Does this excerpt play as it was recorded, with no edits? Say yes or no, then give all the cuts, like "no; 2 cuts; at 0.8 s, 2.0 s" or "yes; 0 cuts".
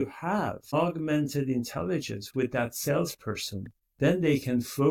yes; 0 cuts